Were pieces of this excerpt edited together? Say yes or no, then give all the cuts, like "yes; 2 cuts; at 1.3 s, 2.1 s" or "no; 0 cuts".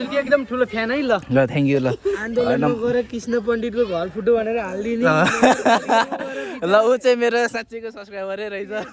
no; 0 cuts